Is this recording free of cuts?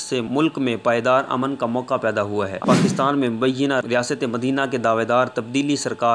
no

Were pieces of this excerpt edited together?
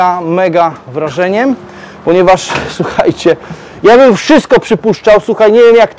no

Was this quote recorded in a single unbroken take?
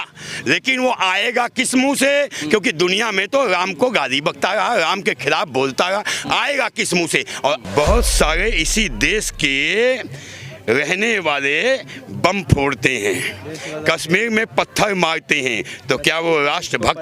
no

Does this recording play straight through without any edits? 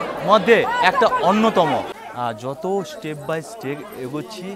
no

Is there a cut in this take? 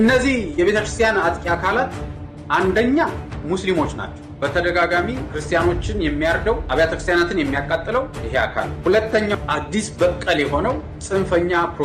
no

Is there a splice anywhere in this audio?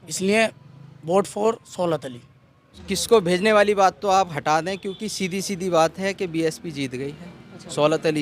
yes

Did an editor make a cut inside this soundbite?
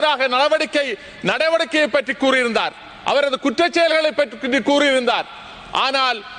no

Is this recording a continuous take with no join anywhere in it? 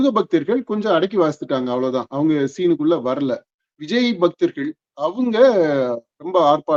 yes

